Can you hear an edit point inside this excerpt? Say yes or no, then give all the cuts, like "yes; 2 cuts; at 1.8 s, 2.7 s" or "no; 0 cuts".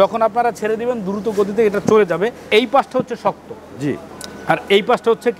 yes; 1 cut; at 2.4 s